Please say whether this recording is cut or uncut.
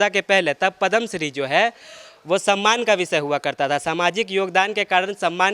uncut